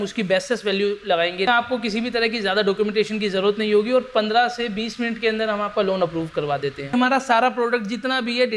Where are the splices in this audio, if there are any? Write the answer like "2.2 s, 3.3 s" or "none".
1.5 s, 7.0 s